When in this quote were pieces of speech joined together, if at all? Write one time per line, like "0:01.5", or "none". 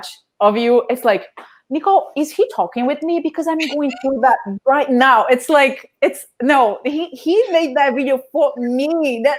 none